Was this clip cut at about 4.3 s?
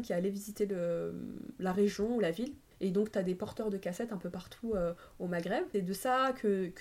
no; 2 cuts; at 2.6 s, 5.7 s

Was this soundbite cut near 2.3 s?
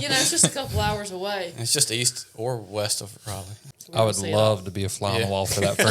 no; 1 cut; at 3.5 s

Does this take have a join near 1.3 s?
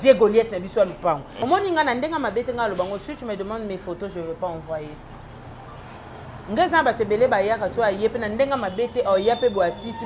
yes; 1 cut; at 1.3 s

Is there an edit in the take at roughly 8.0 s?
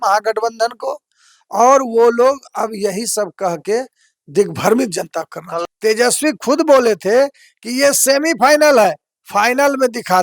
no; 1 cut; at 5.6 s

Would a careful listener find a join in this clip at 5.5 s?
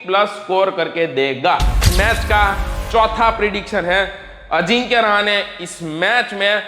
no; 1 cut; at 1.9 s

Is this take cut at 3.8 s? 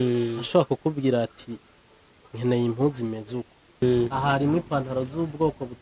yes; 1 cut; at 3.8 s

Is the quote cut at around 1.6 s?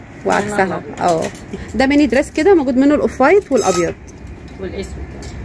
yes; 1 cut; at 1.6 s

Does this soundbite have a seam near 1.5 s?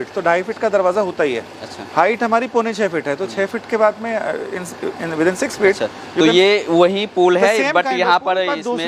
no; 0 cuts

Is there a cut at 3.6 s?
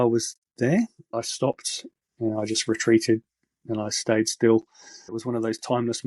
no; 2 cuts; at 1.1 s, 5.0 s

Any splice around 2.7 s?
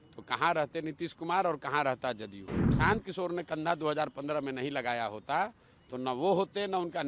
yes; 1 cut; at 2.7 s

